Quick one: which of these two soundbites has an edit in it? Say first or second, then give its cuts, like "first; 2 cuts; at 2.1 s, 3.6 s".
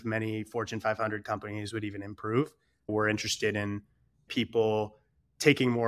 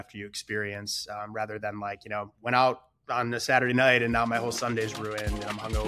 first; 2 cuts; at 2.9 s, 4.3 s